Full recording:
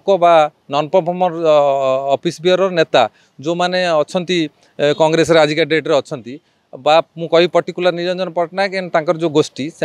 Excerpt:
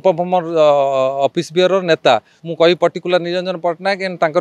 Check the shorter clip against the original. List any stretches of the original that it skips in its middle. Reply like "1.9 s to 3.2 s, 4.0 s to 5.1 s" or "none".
3.3 s to 7.2 s